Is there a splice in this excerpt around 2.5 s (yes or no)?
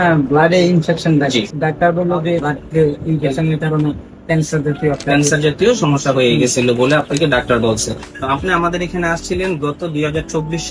yes